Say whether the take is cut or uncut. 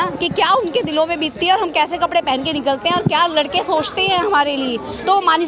uncut